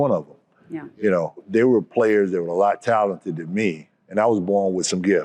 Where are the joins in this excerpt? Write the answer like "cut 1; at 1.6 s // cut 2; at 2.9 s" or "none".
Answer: cut 1; at 1.5 s // cut 2; at 3.9 s